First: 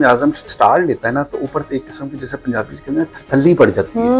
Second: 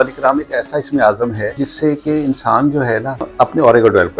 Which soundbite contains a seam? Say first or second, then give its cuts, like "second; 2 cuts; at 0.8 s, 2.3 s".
second; 2 cuts; at 1.6 s, 3.3 s